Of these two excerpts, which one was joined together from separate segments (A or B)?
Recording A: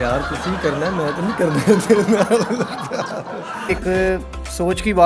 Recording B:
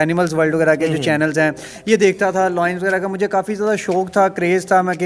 A